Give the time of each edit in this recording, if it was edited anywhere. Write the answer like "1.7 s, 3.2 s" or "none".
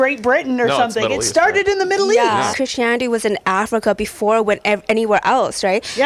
2.5 s